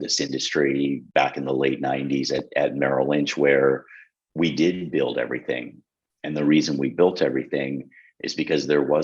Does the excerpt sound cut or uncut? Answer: cut